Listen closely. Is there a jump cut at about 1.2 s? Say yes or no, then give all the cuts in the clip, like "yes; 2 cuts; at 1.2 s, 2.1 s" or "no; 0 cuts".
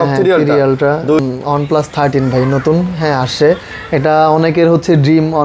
yes; 1 cut; at 1.2 s